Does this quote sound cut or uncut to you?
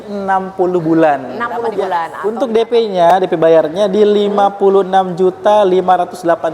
cut